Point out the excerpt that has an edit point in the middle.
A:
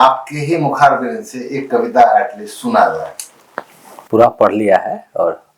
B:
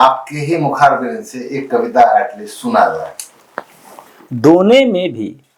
B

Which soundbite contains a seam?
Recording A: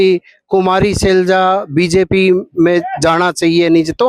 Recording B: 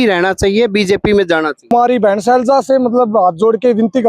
B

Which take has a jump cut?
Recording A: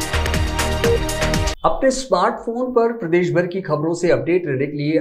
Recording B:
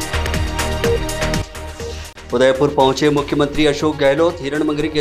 B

